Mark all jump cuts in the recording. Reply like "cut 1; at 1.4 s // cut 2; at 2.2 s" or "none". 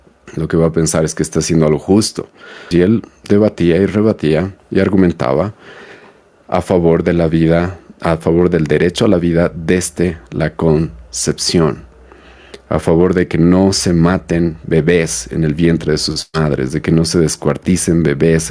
cut 1; at 2.6 s